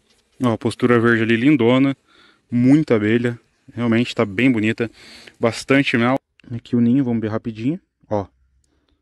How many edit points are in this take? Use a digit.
1